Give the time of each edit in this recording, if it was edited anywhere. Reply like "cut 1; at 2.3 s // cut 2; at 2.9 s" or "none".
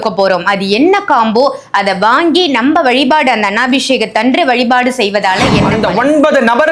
cut 1; at 5.6 s